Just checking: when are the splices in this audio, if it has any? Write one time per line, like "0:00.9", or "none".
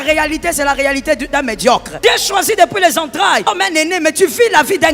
0:01.9
0:03.5